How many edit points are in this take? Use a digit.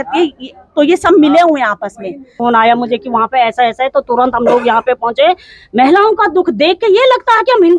1